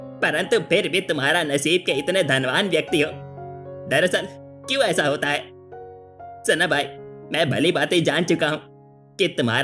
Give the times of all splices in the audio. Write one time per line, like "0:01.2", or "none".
none

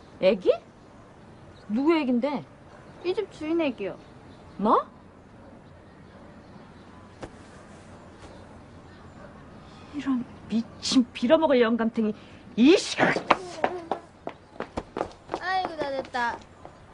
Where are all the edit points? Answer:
0:11.7

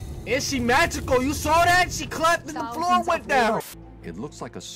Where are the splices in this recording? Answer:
0:03.6

